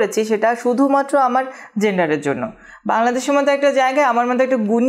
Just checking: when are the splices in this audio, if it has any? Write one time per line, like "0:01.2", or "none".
none